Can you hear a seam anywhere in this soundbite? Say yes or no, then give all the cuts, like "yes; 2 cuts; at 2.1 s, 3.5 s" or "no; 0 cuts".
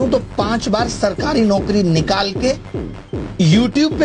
no; 0 cuts